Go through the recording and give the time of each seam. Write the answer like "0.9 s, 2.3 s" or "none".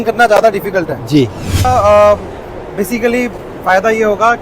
1.7 s

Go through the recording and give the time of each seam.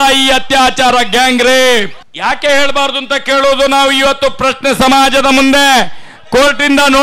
2.0 s

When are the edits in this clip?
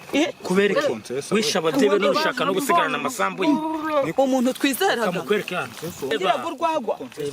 6.1 s

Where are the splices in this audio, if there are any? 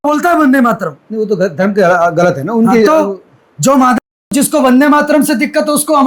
none

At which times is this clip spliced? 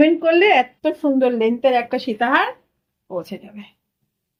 none

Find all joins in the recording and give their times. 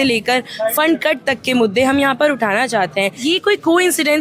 3.2 s

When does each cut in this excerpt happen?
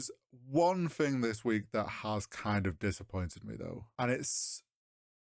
3.8 s

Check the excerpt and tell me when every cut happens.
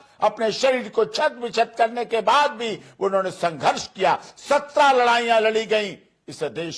none

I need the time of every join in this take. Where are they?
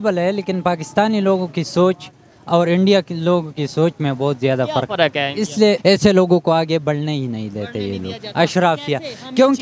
5.8 s

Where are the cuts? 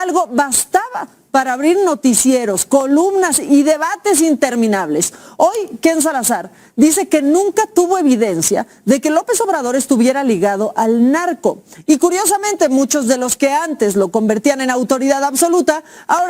none

